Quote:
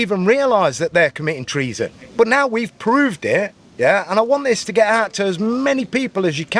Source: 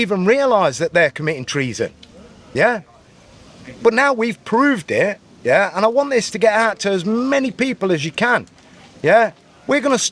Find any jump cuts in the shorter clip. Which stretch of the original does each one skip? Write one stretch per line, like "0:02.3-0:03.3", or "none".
0:02.0-0:03.7